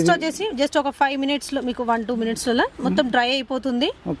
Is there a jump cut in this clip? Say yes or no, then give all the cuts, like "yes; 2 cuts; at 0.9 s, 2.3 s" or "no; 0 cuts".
no; 0 cuts